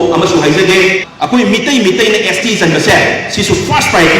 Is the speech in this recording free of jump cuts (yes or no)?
no